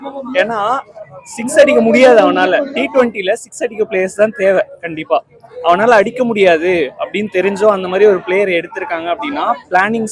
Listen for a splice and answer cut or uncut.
uncut